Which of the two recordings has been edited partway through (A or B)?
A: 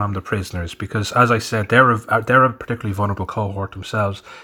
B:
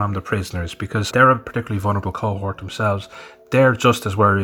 B